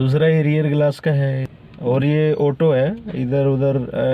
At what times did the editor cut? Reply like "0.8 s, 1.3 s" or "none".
1.5 s